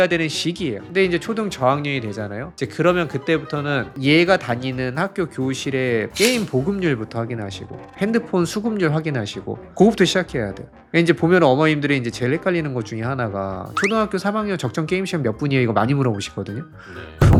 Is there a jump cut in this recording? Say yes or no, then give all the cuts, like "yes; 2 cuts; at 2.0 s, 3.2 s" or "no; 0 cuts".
no; 0 cuts